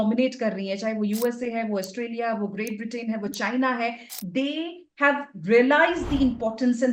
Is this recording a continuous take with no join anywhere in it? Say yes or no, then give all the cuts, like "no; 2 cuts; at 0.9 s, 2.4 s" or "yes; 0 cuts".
yes; 0 cuts